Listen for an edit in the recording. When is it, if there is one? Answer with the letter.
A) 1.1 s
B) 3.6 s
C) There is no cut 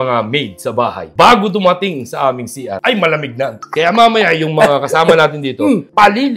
B